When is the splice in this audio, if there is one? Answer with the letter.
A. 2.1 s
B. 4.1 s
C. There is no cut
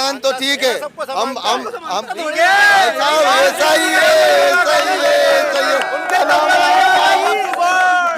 A